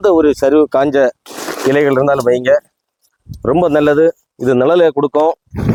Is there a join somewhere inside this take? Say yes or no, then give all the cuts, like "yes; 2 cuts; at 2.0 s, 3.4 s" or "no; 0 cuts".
no; 0 cuts